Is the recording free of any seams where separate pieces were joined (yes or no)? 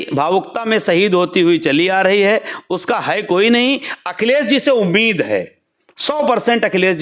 yes